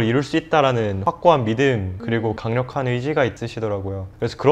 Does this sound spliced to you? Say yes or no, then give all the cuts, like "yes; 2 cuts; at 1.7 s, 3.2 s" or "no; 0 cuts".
yes; 3 cuts; at 1.0 s, 2.2 s, 3.4 s